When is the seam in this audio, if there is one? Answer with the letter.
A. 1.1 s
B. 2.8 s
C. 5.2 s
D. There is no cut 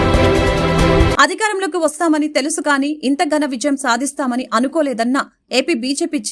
A